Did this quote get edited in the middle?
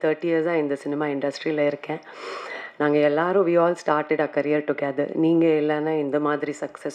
no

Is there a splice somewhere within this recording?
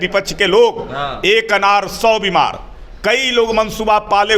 no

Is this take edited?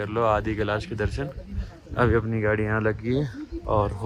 no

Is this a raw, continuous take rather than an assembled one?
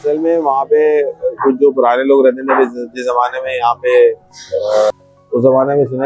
no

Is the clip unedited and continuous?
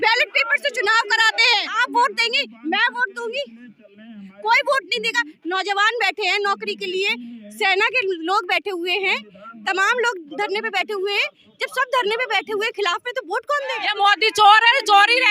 no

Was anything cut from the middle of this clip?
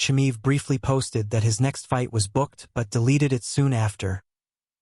no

